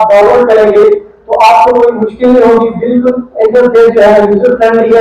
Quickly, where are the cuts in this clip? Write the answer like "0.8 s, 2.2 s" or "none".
none